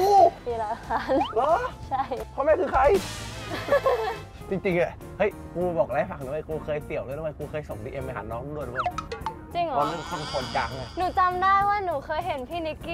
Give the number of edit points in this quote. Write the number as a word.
three